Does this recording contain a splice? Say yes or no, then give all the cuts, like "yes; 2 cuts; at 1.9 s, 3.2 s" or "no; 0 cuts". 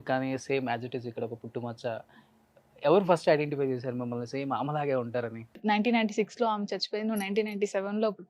yes; 1 cut; at 5.6 s